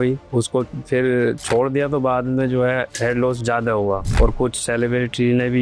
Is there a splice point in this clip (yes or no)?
yes